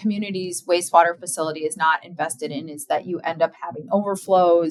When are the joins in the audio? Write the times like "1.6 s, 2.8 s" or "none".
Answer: none